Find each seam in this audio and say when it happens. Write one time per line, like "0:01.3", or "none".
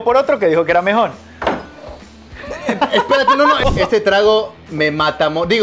0:03.6
0:04.6